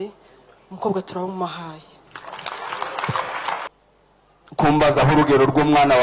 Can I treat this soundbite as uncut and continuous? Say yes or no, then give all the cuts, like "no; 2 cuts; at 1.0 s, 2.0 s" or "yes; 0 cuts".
no; 1 cut; at 3.7 s